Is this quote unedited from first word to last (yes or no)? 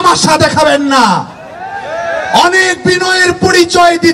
yes